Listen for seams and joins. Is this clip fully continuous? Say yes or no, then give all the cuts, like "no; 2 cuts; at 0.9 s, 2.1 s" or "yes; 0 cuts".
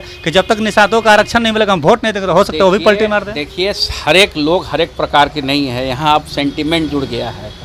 yes; 0 cuts